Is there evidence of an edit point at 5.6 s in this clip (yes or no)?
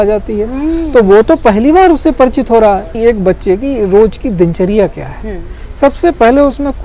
no